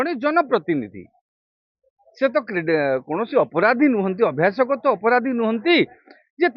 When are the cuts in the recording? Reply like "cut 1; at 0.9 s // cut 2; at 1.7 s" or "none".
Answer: none